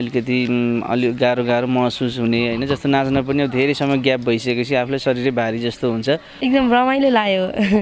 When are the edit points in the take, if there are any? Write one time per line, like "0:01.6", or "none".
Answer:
0:06.3

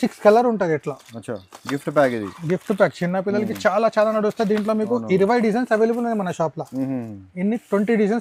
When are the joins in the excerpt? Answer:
none

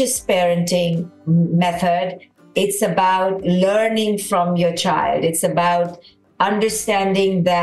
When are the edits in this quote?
0:01.1

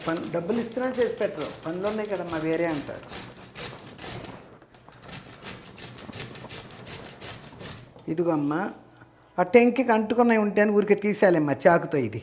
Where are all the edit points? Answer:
0:07.9

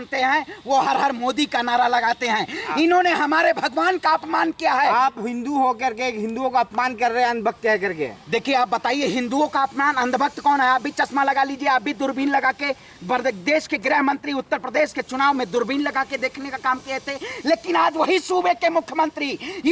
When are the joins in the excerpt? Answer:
none

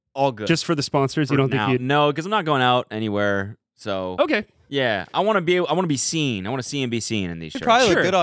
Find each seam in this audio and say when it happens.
none

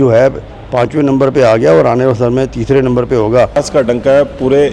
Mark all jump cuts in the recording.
0:03.6

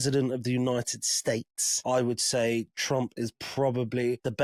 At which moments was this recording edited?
none

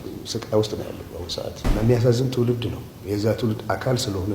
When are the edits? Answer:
0:01.6

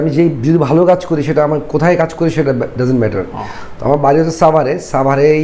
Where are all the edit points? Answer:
none

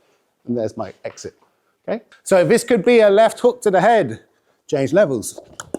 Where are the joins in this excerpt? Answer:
0:02.1

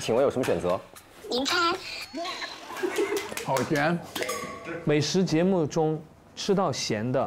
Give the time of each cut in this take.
0:03.3

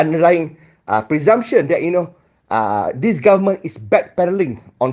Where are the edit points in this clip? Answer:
none

